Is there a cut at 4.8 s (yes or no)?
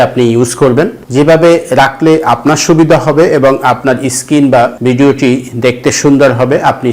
yes